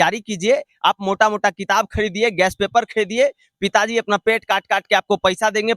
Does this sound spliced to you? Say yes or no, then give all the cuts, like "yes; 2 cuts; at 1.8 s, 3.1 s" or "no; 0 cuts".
no; 0 cuts